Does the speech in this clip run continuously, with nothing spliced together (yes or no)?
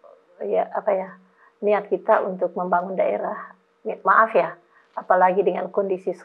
yes